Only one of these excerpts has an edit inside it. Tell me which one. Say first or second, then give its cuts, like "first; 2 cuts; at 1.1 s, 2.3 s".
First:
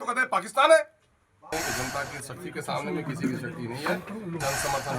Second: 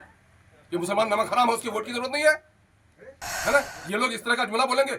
first; 1 cut; at 1.5 s